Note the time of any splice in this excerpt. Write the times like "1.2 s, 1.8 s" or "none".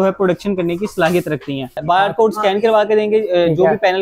1.8 s